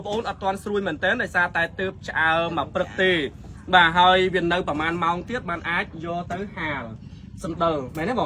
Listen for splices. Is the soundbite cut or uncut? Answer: uncut